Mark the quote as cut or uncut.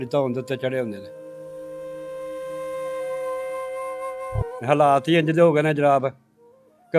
cut